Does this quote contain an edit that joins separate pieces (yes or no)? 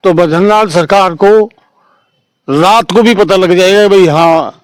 no